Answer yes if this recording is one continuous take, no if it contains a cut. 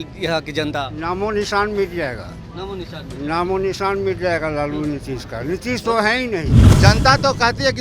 no